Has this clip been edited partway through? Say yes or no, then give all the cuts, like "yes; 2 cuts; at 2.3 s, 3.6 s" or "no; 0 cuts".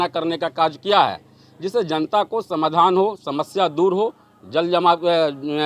no; 0 cuts